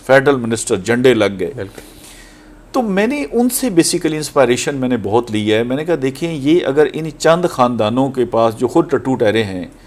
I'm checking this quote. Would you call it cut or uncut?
uncut